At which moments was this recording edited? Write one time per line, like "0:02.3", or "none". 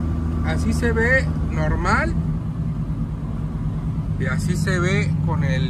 none